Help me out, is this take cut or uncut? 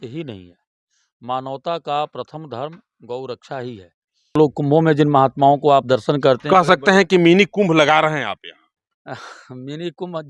cut